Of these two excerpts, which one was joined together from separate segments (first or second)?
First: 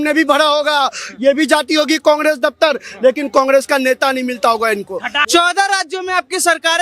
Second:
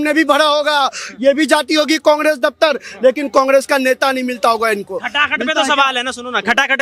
first